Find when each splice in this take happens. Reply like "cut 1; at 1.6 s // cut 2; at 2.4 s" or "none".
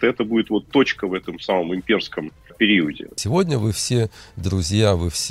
cut 1; at 2.5 s // cut 2; at 3.1 s